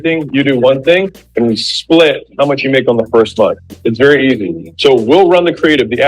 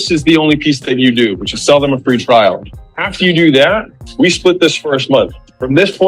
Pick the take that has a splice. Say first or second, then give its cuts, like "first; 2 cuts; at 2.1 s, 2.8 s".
first; 1 cut; at 4.6 s